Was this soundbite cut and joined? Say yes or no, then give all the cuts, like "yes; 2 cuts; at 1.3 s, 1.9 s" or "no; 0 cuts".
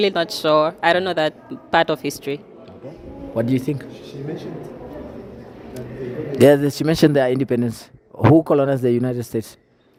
no; 0 cuts